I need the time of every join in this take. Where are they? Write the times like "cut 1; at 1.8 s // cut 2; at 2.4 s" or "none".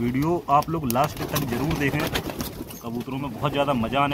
none